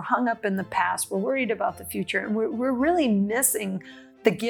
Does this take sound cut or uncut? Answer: uncut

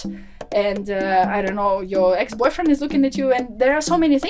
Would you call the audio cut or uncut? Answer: uncut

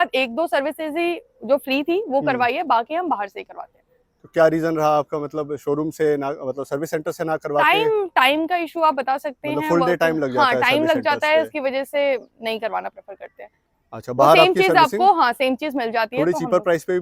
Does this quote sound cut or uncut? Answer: uncut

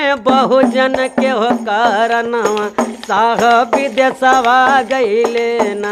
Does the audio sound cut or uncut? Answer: uncut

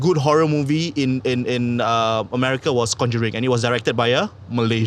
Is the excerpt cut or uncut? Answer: uncut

